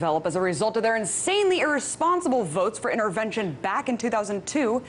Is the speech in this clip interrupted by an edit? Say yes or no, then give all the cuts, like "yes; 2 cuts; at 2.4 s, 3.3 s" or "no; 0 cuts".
no; 0 cuts